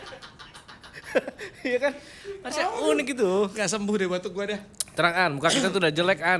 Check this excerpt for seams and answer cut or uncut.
uncut